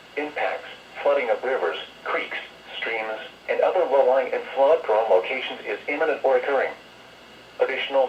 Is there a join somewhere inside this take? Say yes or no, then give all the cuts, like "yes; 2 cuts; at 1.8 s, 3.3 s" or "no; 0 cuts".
no; 0 cuts